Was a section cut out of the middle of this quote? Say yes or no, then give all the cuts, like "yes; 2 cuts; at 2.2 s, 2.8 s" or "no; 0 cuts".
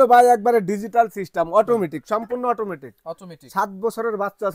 no; 0 cuts